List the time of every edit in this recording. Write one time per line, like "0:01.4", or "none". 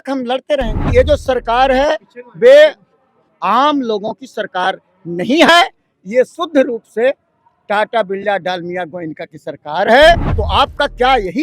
0:00.9
0:10.3